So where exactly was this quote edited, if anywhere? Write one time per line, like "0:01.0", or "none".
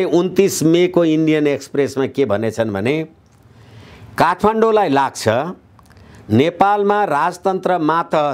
none